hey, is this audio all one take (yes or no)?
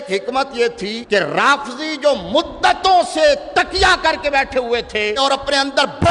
no